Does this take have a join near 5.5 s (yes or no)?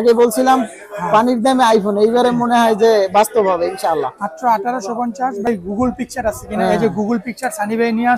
yes